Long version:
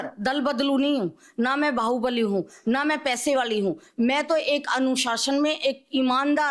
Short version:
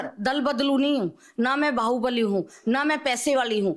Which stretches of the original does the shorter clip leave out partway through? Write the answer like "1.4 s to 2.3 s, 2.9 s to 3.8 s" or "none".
none